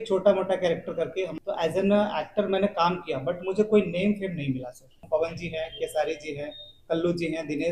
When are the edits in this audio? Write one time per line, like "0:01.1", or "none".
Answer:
0:01.3
0:05.0